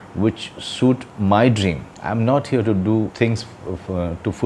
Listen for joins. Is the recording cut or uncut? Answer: cut